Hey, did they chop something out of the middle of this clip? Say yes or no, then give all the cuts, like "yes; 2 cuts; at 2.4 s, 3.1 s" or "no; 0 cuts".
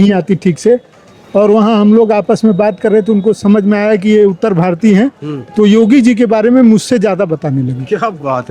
no; 0 cuts